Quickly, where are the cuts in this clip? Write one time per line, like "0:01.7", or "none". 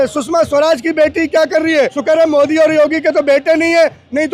0:02.0